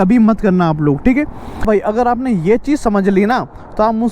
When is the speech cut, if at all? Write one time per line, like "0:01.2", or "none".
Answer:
0:01.6